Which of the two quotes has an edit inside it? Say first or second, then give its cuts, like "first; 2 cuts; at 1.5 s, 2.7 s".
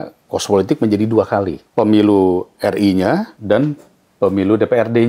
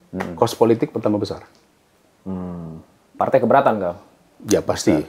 first; 2 cuts; at 1.6 s, 3.3 s